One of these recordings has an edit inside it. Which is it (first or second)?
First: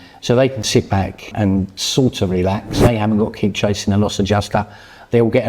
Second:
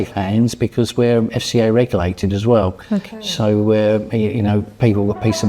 first